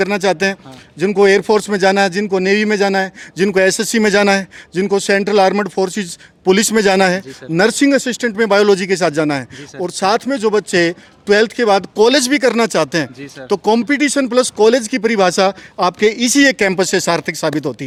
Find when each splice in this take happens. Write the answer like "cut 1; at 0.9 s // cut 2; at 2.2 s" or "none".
none